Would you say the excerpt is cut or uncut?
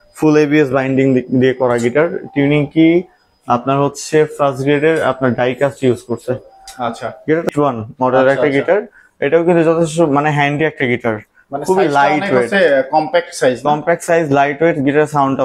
cut